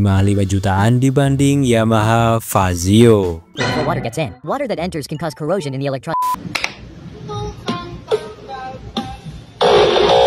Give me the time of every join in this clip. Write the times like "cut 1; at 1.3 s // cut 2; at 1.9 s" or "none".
cut 1; at 3.6 s // cut 2; at 6.2 s

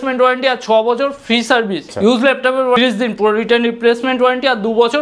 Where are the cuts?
cut 1; at 1.8 s // cut 2; at 2.8 s

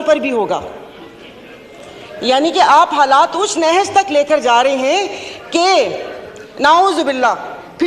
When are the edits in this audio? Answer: none

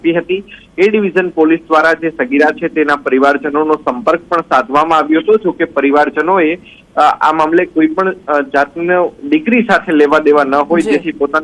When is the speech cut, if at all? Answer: none

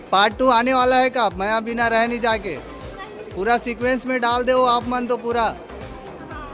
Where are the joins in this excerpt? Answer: none

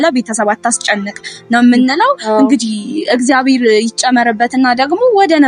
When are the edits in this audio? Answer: none

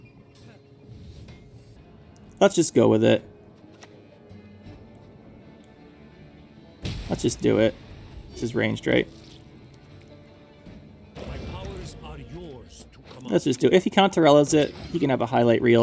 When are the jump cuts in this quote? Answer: cut 1; at 1.8 s

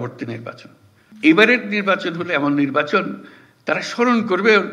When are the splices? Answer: cut 1; at 1.0 s

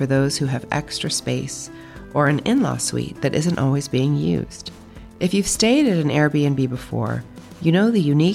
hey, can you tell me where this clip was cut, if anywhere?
none

